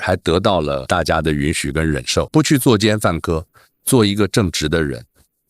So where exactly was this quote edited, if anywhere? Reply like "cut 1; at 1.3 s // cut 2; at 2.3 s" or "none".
cut 1; at 0.9 s // cut 2; at 2.3 s